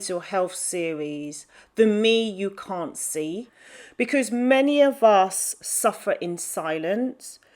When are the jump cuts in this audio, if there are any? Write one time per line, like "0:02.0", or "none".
0:03.5